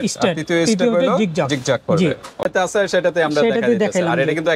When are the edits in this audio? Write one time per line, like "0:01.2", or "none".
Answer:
0:02.4